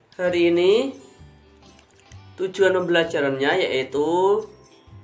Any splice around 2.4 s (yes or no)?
no